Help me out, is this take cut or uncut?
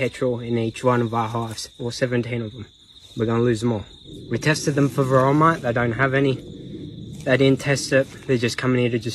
uncut